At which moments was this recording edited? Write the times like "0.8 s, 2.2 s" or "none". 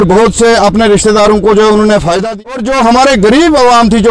2.2 s